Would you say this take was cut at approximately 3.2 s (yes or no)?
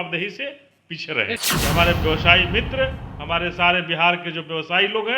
no